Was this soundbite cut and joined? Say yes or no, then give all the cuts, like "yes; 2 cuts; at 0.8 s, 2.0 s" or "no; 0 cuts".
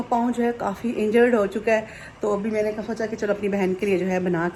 no; 0 cuts